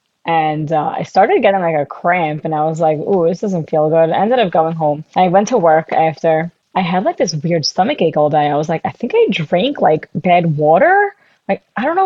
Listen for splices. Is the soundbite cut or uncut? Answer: cut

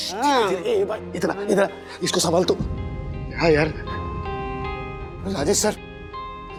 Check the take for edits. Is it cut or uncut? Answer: uncut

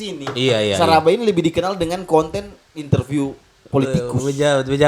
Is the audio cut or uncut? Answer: uncut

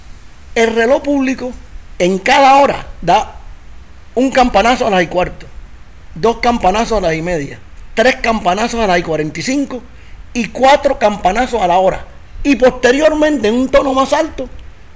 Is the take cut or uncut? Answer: uncut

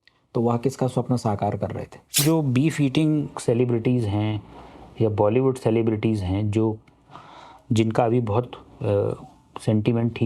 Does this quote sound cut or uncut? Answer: cut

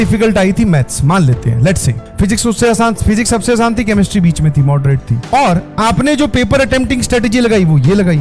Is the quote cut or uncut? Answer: uncut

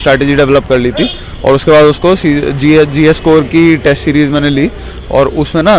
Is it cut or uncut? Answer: uncut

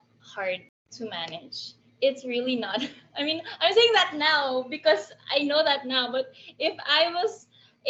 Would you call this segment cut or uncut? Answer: uncut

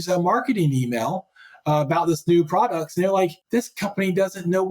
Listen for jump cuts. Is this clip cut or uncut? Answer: cut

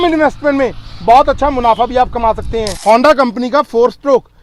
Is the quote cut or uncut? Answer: cut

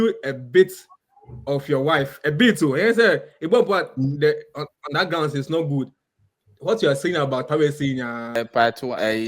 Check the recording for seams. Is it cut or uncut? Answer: cut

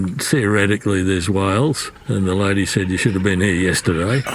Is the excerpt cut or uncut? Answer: cut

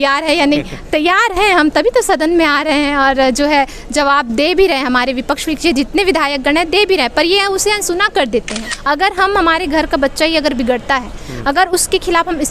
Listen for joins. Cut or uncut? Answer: cut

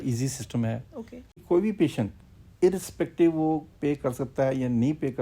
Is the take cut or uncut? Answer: cut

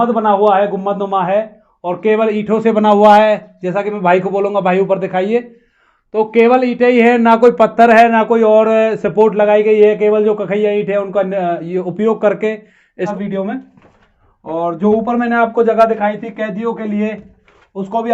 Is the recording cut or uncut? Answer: cut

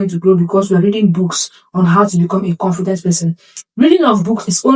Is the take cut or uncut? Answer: uncut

